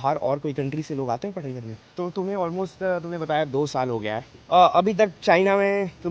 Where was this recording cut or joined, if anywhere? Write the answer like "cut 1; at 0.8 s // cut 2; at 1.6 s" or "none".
cut 1; at 1.8 s // cut 2; at 4.3 s